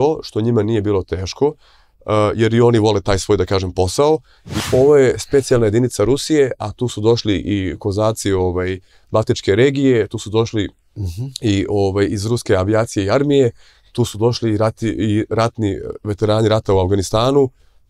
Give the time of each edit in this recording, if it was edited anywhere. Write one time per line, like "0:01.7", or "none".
0:04.6

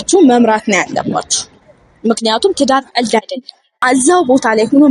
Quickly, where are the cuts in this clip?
0:03.8

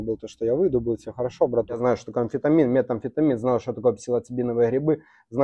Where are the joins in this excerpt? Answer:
0:01.8

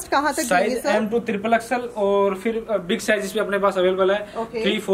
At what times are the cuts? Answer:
none

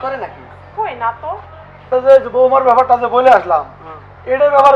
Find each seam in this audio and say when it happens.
0:01.9

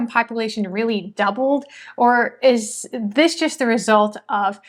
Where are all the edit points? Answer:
none

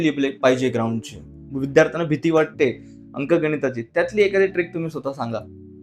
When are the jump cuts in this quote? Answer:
0:01.5

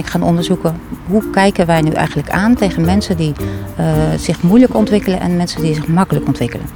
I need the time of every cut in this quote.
none

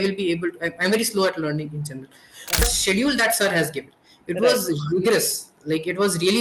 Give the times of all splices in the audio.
0:02.6

